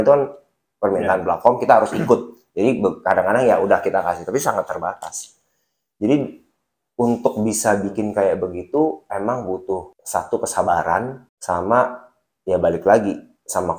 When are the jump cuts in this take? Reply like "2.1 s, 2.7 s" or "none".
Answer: 10.0 s, 11.3 s